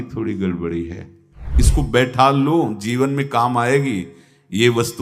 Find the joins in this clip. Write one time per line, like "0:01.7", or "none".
0:01.5